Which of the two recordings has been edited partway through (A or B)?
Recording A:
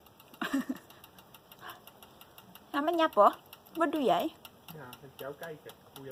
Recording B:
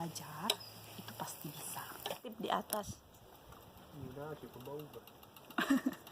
B